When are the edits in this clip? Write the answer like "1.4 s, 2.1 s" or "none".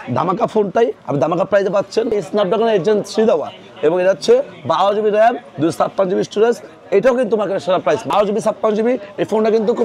2.1 s, 8.1 s